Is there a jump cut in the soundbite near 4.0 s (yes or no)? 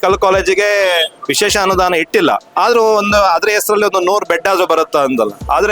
no